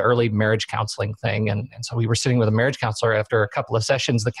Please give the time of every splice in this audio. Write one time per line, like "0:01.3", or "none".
none